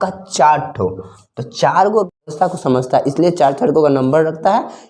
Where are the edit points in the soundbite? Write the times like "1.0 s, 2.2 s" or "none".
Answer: 2.3 s